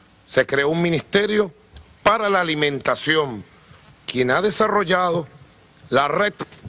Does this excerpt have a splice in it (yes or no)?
yes